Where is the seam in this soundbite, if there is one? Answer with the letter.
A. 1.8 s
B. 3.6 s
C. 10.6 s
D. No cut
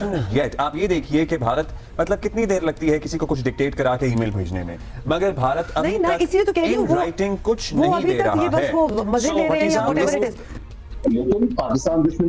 C